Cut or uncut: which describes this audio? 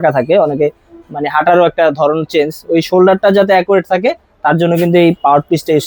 uncut